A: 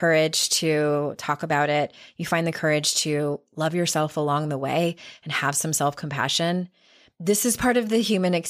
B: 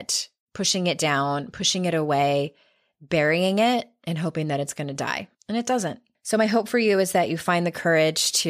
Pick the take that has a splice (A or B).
B